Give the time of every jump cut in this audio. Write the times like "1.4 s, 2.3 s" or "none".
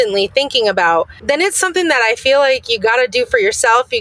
1.1 s

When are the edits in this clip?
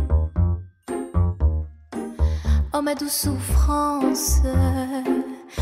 2.4 s

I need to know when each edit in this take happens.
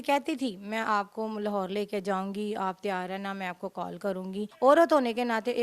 4.5 s

